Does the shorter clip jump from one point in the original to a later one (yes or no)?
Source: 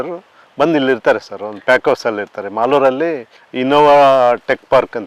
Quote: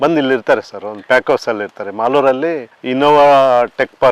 yes